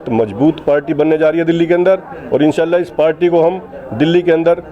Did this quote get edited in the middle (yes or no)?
no